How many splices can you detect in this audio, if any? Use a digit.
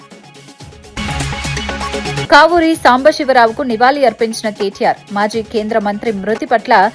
1